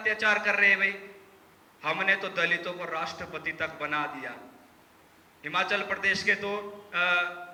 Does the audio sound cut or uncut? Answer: uncut